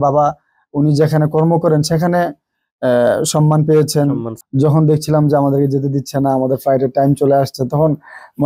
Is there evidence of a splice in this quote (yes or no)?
yes